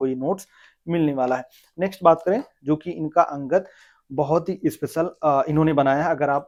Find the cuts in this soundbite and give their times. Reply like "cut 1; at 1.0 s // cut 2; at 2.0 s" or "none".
none